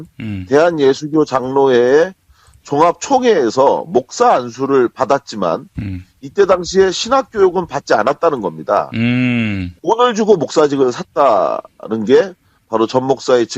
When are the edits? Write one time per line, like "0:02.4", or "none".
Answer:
0:01.0